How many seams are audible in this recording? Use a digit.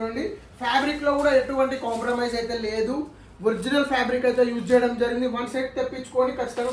0